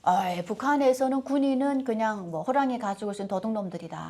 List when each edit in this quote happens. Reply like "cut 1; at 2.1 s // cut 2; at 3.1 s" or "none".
none